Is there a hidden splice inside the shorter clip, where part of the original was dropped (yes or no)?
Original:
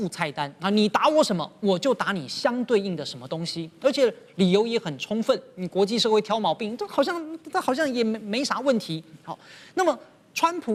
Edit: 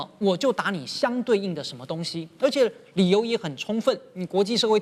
no